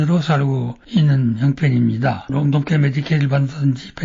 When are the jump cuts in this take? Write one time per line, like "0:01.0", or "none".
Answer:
0:02.3